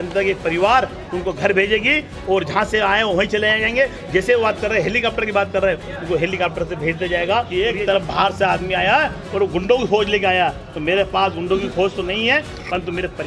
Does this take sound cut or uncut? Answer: cut